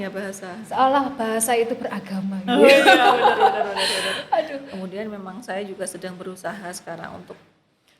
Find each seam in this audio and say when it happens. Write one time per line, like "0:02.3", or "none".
0:04.6